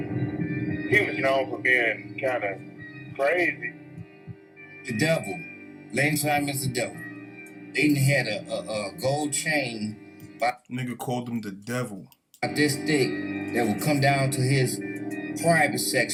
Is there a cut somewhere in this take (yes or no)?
no